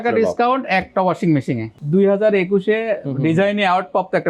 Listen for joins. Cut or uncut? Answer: cut